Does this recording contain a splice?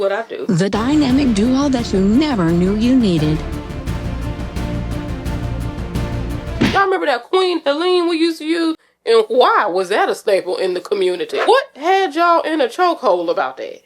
yes; 2 cuts; at 6.7 s, 11.3 s

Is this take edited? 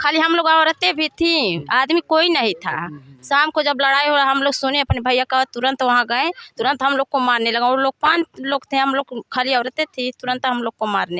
no; 0 cuts

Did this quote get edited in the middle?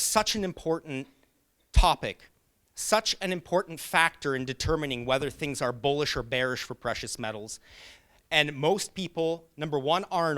no; 0 cuts

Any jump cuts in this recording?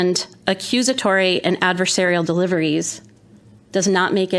no; 0 cuts

